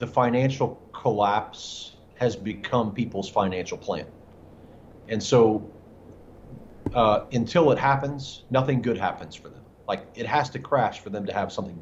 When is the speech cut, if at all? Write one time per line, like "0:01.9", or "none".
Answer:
none